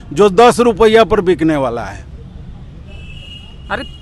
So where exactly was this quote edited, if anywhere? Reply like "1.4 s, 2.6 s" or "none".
none